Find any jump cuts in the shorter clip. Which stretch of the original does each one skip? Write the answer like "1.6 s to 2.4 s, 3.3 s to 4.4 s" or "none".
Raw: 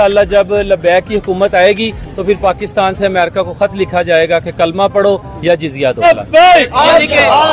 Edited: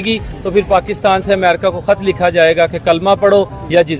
none